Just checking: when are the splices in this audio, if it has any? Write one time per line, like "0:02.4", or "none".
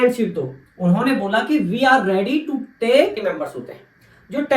0:03.2